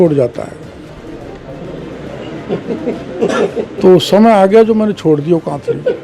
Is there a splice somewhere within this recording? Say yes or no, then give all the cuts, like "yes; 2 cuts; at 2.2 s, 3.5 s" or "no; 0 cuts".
no; 0 cuts